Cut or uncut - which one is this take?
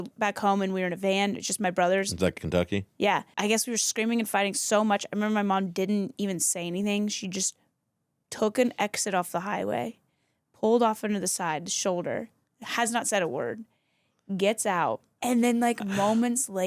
cut